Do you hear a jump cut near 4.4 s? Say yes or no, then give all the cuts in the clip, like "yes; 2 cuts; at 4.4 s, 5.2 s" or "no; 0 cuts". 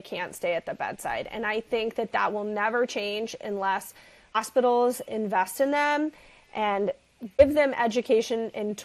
yes; 2 cuts; at 4.4 s, 7.4 s